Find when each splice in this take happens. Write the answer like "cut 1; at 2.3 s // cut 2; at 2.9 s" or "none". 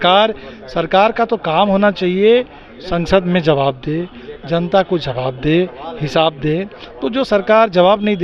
none

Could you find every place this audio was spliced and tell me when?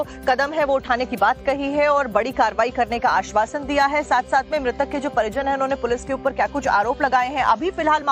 cut 1; at 3.8 s

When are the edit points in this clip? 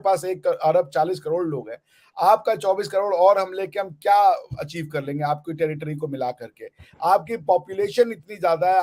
none

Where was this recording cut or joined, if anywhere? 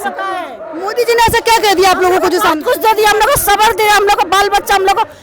none

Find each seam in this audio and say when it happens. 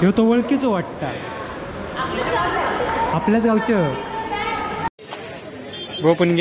cut 1; at 4.9 s

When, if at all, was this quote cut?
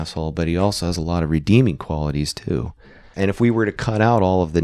cut 1; at 2.8 s

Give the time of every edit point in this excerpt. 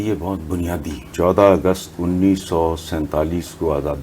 cut 1; at 1.1 s

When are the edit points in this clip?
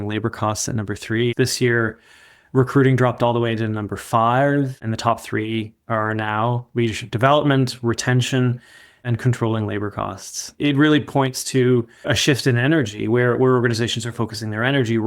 cut 1; at 1.3 s // cut 2; at 4.8 s // cut 3; at 10.4 s // cut 4; at 12.1 s

